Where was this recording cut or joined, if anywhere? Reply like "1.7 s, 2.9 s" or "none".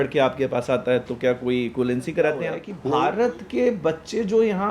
2.7 s